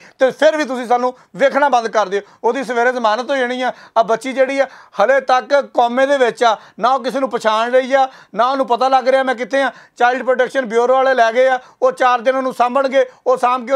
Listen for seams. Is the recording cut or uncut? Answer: uncut